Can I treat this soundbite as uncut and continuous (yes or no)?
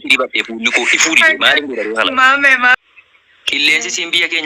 no